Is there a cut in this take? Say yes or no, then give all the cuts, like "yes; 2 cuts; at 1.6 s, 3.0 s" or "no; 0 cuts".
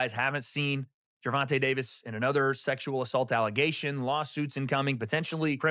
no; 0 cuts